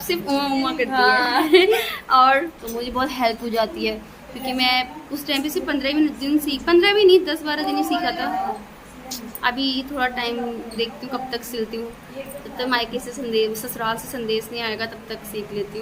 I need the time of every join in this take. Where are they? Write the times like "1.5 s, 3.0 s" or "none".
none